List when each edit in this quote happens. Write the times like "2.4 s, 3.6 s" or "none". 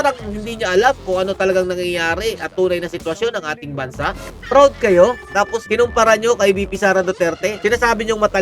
4.3 s, 5.6 s, 7.5 s